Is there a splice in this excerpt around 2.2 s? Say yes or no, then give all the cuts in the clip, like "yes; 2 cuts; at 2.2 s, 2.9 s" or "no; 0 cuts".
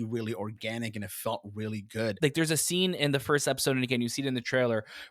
yes; 1 cut; at 2.2 s